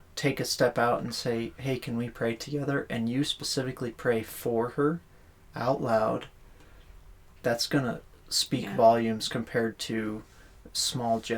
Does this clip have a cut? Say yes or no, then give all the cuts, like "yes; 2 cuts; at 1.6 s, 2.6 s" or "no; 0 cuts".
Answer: no; 0 cuts